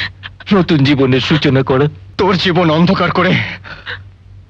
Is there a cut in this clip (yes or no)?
yes